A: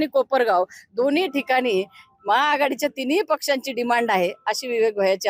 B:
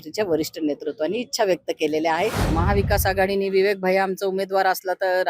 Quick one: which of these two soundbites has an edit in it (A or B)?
B